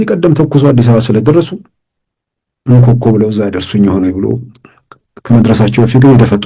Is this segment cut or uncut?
uncut